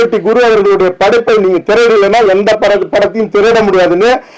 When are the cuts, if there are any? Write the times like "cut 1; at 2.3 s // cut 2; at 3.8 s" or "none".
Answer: none